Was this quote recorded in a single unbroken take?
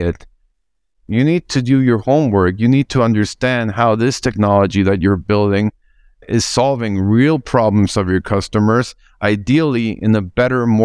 no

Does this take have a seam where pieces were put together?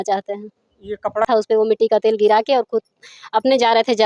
yes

